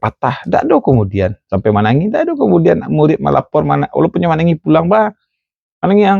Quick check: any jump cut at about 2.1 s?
no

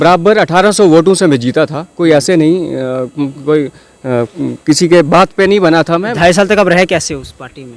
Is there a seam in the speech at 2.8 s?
no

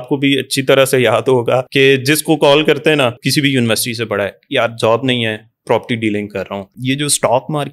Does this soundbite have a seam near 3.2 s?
yes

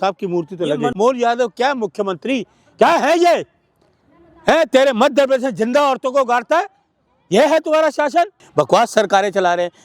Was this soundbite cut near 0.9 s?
yes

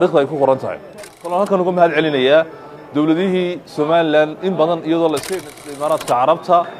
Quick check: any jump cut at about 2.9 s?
no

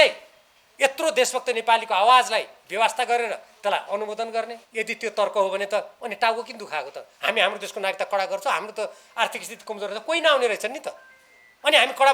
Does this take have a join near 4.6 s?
yes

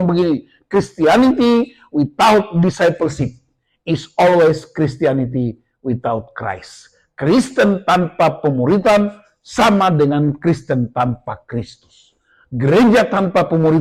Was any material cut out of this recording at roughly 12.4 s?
no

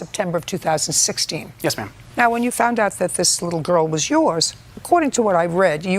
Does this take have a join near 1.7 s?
yes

